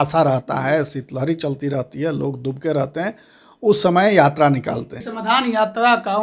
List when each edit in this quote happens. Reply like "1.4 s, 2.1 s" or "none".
5.1 s